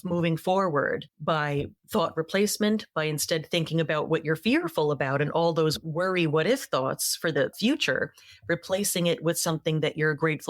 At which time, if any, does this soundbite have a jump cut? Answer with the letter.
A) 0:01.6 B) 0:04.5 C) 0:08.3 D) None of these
A